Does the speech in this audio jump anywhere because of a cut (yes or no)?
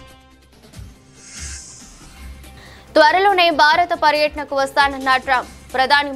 no